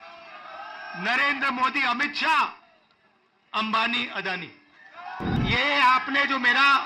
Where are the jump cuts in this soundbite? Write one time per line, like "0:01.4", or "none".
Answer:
0:05.4

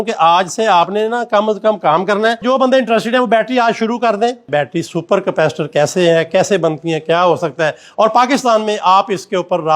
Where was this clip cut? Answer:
0:02.4
0:04.5

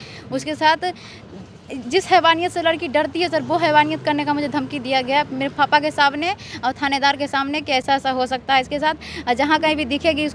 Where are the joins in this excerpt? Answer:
none

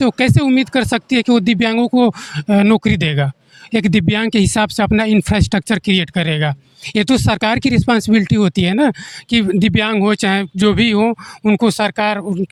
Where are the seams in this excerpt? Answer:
none

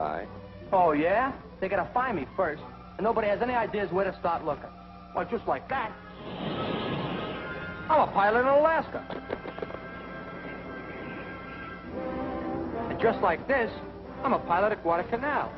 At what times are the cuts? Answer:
none

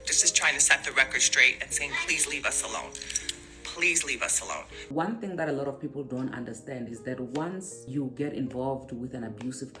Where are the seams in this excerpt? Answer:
0:04.8
0:07.9

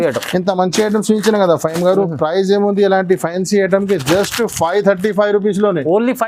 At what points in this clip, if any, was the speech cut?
none

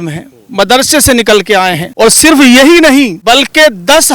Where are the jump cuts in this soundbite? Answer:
0:01.8
0:03.2

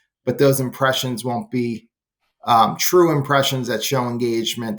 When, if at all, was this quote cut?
none

